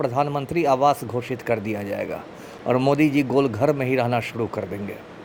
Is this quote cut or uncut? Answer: uncut